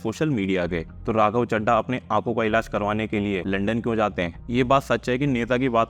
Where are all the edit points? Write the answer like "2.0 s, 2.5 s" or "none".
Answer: 0.9 s, 3.4 s, 4.4 s